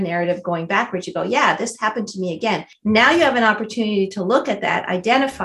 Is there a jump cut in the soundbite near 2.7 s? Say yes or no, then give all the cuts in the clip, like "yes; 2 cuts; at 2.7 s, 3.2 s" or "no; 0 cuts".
yes; 1 cut; at 2.7 s